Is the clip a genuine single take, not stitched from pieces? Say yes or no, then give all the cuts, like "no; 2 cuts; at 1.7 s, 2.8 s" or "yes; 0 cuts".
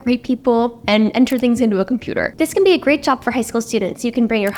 yes; 0 cuts